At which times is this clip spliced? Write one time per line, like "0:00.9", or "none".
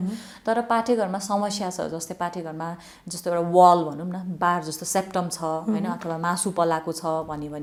none